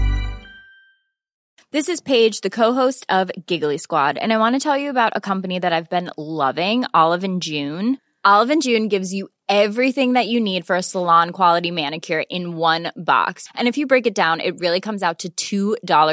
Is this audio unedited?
no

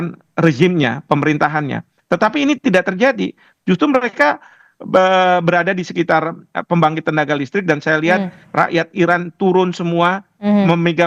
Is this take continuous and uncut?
yes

